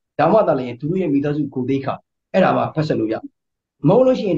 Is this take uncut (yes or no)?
yes